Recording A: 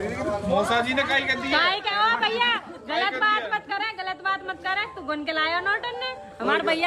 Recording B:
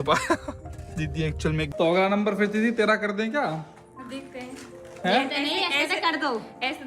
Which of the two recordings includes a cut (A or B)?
B